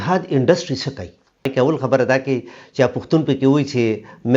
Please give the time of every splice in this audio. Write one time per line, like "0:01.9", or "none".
0:01.5